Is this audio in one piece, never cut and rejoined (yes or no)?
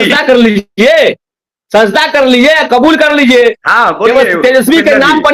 yes